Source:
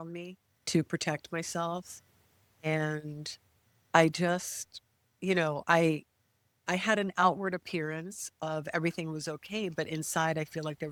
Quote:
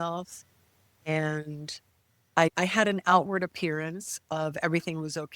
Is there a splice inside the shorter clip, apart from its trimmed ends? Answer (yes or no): yes